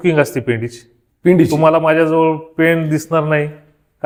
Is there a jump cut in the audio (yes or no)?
no